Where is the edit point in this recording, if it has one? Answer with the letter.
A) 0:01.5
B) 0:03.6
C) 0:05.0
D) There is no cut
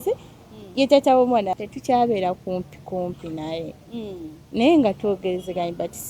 A